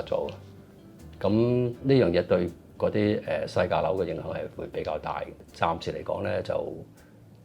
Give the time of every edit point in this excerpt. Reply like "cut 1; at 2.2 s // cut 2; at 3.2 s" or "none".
cut 1; at 5.4 s